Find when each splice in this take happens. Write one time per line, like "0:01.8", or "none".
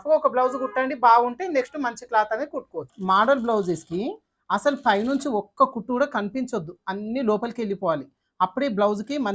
0:02.9